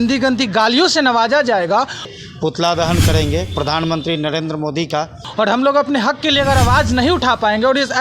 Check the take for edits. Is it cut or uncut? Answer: cut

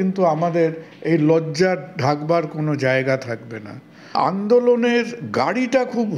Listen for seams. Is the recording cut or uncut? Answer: cut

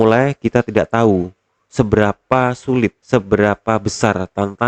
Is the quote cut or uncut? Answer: cut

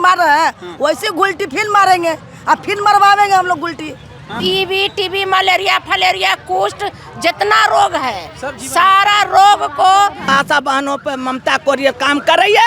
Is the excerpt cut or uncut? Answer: cut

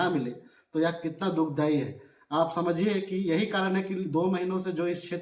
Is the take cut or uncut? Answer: uncut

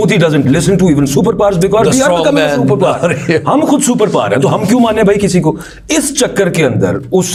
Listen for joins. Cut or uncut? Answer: uncut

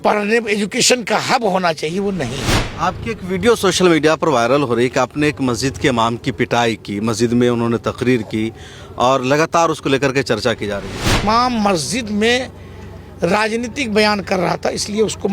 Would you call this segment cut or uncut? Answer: cut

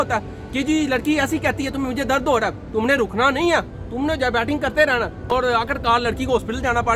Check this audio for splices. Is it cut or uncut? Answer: cut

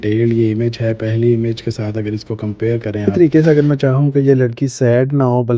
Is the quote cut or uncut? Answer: cut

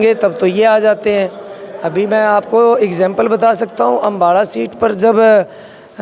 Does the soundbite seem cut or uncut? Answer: uncut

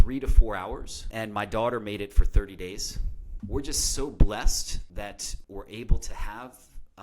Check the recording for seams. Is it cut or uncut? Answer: cut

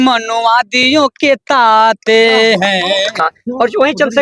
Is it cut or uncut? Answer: cut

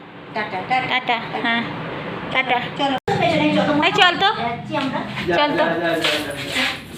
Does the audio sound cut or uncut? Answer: cut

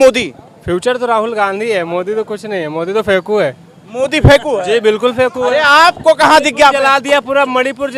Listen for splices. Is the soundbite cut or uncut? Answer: uncut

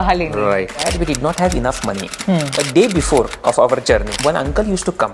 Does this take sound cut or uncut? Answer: cut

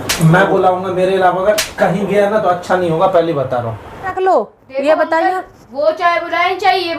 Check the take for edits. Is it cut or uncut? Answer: cut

